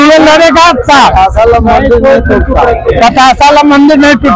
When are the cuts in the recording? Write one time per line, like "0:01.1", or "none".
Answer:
none